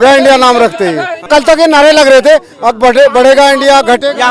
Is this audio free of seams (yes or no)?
no